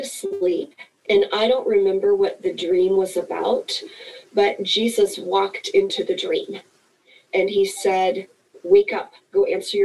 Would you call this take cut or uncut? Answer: uncut